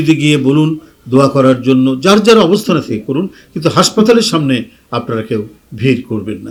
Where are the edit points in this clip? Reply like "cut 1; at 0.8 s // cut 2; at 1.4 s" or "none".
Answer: none